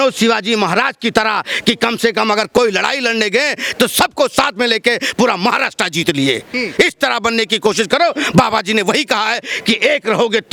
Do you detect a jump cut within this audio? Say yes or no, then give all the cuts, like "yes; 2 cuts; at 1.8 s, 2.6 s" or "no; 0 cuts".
no; 0 cuts